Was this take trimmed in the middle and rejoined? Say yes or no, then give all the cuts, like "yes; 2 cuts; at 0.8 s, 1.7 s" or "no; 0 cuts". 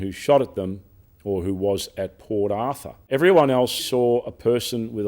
yes; 2 cuts; at 2.9 s, 3.8 s